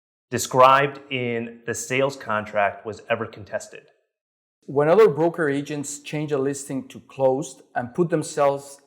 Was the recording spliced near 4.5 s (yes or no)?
yes